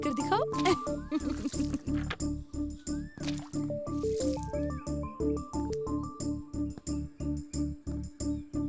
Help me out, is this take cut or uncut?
uncut